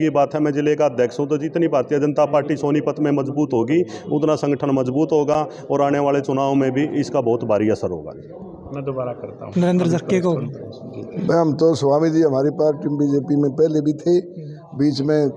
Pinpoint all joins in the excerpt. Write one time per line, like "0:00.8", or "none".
none